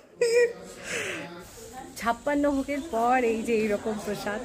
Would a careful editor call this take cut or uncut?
cut